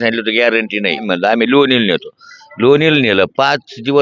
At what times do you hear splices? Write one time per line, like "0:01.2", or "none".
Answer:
0:01.0